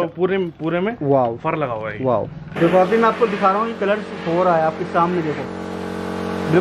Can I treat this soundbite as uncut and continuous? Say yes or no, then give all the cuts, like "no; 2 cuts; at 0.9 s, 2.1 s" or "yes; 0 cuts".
no; 1 cut; at 2.5 s